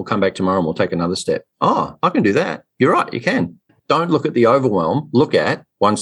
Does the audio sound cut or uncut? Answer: cut